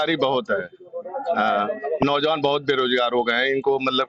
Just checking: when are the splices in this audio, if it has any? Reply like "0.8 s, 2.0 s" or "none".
none